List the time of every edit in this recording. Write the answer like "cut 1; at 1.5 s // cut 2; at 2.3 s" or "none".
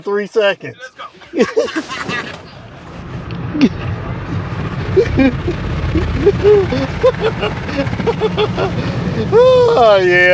none